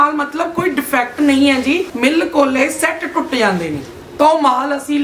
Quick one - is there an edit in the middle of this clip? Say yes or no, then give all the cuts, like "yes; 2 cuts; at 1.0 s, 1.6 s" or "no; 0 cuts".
yes; 2 cuts; at 1.9 s, 3.9 s